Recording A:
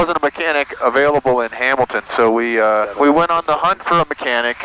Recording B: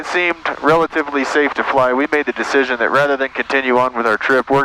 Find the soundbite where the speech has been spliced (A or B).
A